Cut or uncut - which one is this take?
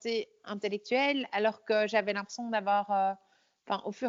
uncut